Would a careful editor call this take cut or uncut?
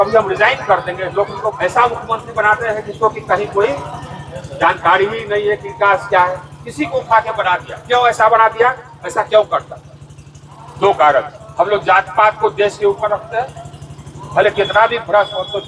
cut